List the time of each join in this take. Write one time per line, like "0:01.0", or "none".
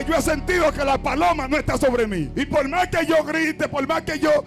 0:02.3